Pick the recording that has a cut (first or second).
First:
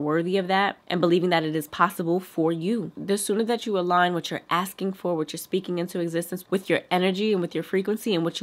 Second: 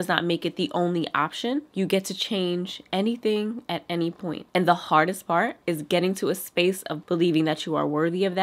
second